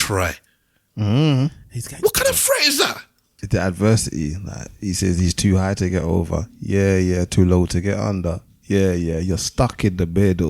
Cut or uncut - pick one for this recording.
cut